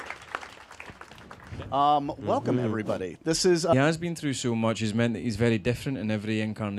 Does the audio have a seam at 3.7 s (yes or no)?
no